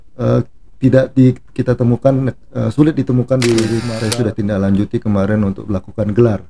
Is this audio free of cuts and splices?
no; 1 cut; at 3.8 s

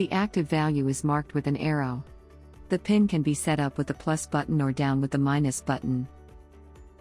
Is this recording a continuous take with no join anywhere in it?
no; 1 cut; at 6.1 s

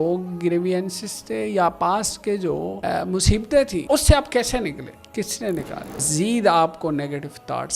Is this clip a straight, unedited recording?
no; 4 cuts; at 2.7 s, 3.8 s, 5.0 s, 6.1 s

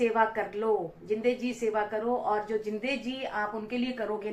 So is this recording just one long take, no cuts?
yes; 0 cuts

